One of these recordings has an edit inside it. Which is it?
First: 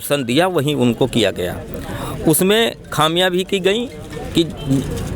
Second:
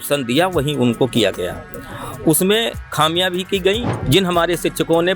second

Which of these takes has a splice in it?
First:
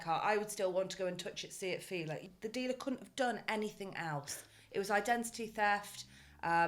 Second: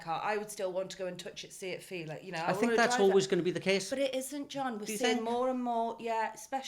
first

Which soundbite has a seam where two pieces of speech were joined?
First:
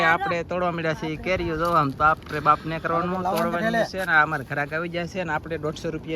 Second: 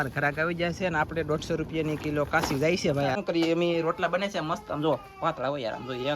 second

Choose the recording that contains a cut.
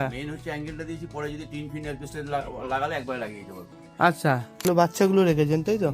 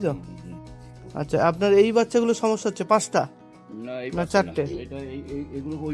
first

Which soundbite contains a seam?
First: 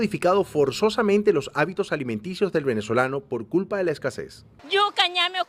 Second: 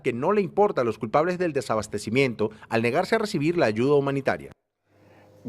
second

